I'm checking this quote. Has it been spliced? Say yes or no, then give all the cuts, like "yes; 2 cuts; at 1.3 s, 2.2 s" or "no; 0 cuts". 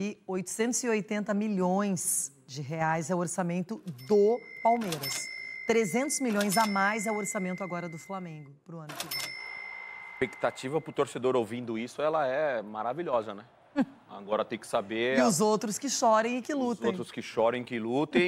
no; 0 cuts